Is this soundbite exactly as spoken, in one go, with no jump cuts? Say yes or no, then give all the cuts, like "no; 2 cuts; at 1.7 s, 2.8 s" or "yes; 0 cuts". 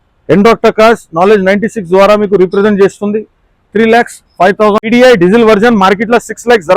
no; 1 cut; at 4.8 s